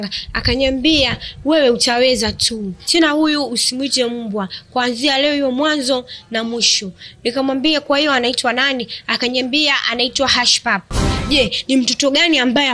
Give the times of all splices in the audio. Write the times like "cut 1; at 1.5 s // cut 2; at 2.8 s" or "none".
cut 1; at 2.8 s // cut 2; at 11.1 s